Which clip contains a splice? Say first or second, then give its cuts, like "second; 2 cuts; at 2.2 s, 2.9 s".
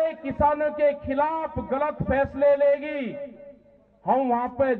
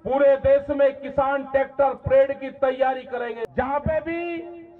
second; 1 cut; at 3.4 s